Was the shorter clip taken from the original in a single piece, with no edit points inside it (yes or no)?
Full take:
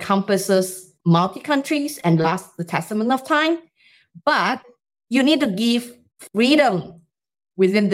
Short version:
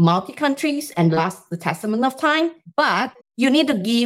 no